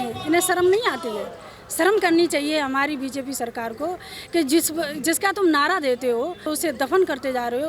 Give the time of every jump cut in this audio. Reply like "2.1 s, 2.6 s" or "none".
6.5 s